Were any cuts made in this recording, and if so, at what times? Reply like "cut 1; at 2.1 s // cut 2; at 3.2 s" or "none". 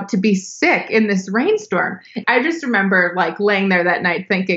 cut 1; at 2.2 s